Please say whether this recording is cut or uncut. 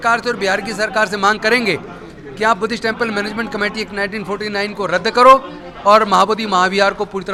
uncut